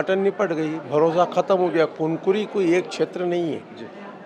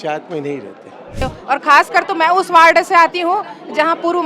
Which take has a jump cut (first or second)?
second